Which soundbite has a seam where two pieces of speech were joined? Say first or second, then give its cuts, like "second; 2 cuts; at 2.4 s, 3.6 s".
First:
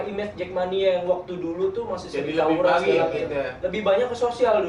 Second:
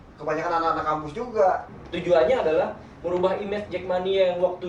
second; 1 cut; at 1.7 s